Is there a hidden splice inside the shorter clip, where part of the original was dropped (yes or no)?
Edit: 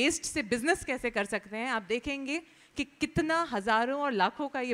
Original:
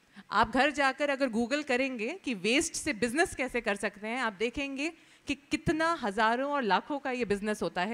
no